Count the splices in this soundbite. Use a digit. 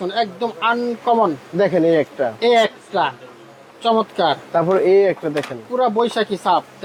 0